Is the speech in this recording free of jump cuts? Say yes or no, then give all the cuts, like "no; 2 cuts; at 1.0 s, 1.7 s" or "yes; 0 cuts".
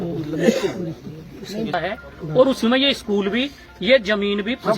no; 1 cut; at 1.7 s